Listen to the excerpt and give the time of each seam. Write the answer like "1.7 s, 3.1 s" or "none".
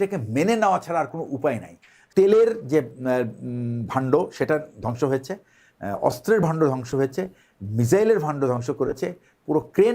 2.0 s